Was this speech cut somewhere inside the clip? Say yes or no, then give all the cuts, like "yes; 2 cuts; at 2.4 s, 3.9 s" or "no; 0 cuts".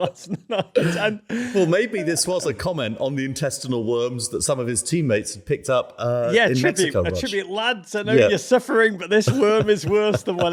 no; 0 cuts